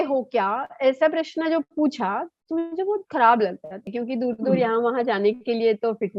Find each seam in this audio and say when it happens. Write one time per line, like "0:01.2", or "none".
0:03.9